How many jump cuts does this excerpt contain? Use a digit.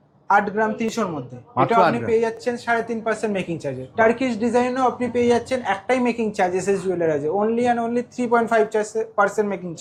0